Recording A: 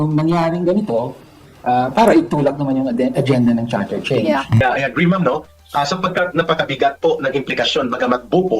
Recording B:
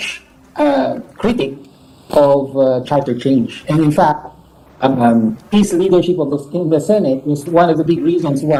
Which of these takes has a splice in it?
A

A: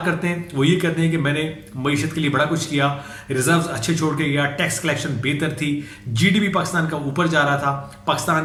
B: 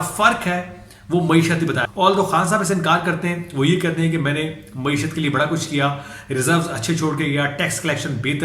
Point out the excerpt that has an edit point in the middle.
B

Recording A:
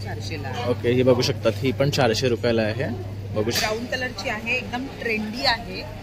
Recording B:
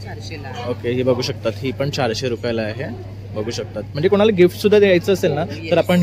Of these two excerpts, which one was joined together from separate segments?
A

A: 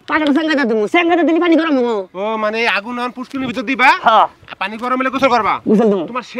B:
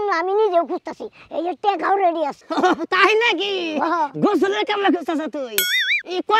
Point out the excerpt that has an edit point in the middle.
B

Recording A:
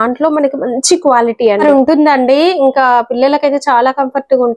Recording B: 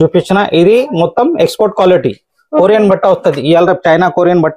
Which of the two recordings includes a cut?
A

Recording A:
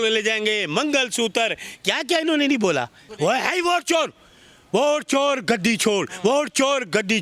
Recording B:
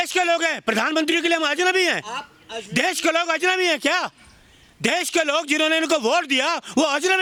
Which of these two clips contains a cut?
A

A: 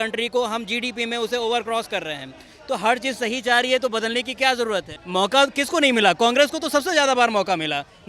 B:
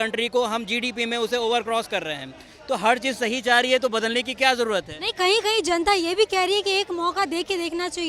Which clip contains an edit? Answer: A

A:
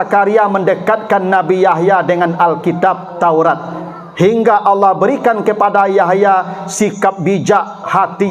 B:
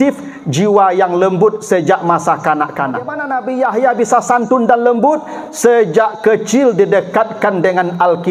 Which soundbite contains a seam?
B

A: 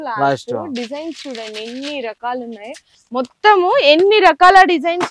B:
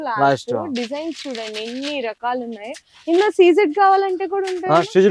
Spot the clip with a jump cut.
A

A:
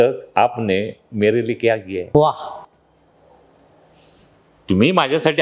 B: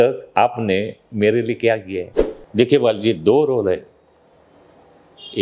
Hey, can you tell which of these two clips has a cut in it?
B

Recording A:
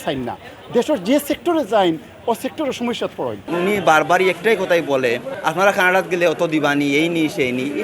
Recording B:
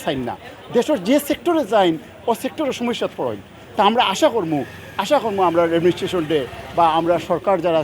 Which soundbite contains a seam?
A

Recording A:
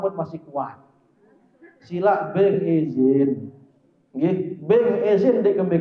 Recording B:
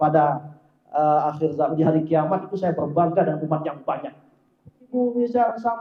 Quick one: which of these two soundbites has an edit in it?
B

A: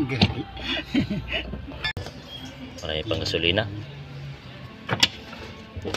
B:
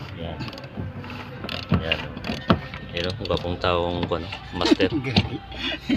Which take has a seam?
A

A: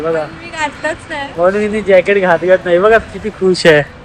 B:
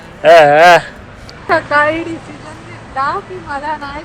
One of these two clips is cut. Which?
B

